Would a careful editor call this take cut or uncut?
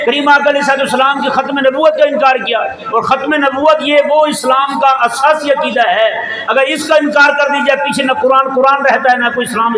uncut